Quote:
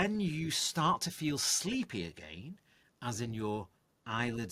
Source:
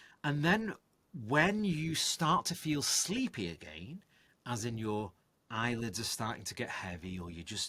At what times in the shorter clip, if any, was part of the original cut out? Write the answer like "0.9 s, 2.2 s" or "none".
none